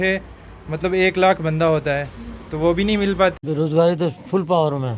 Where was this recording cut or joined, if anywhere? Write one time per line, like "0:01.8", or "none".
0:03.4